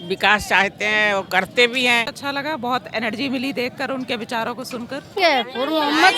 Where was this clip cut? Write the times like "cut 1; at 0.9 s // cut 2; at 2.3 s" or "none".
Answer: cut 1; at 2.2 s // cut 2; at 5.2 s